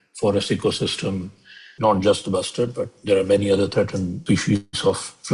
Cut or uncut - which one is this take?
cut